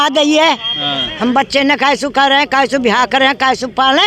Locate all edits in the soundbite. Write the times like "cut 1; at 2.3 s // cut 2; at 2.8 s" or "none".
none